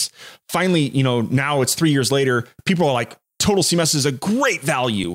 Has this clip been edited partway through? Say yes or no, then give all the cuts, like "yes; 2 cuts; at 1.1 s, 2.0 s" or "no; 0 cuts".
no; 0 cuts